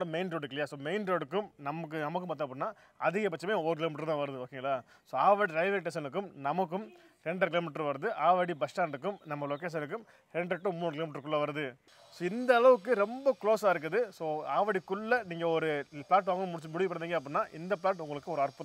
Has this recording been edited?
no; 0 cuts

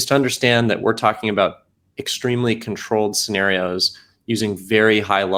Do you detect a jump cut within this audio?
no; 0 cuts

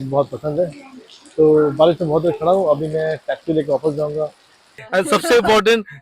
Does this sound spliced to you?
yes; 1 cut; at 4.7 s

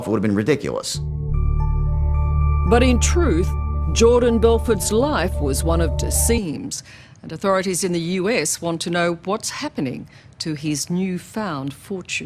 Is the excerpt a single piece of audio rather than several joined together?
yes; 0 cuts

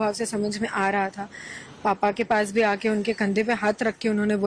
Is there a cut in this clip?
no; 0 cuts

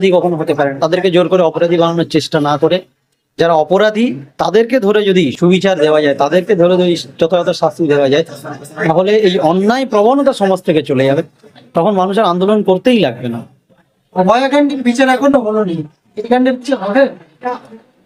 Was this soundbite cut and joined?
no; 0 cuts

